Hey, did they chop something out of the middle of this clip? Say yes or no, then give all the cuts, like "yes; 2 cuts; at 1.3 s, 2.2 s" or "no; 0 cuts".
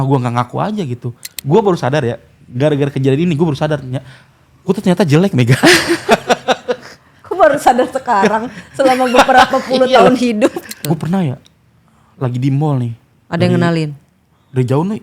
yes; 2 cuts; at 1.3 s, 10.8 s